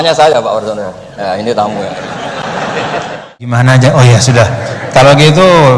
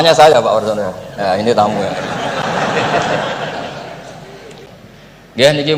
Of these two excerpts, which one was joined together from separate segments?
first; 1 cut; at 3.6 s

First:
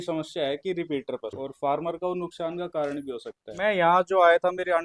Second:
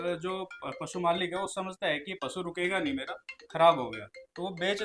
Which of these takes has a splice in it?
first; 2 cuts; at 1.4 s, 3.5 s

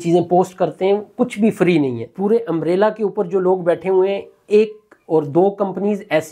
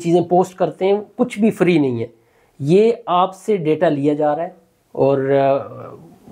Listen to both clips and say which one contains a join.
first; 1 cut; at 2.1 s

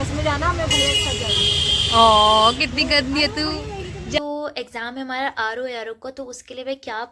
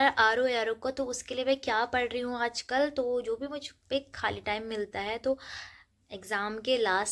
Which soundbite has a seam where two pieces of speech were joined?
first; 1 cut; at 4.2 s

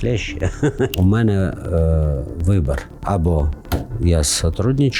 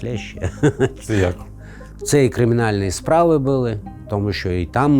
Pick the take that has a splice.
first; 2 cuts; at 0.9 s, 2.9 s

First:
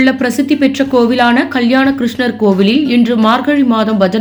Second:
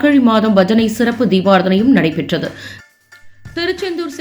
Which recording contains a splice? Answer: second; 1 cut; at 2.7 s

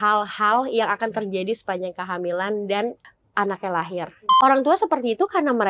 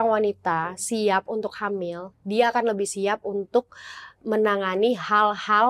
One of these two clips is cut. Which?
first; 2 cuts; at 3.0 s, 4.2 s

